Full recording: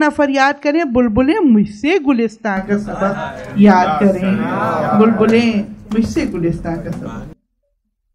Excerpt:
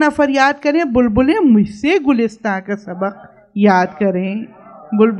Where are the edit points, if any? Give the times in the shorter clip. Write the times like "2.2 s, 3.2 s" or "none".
none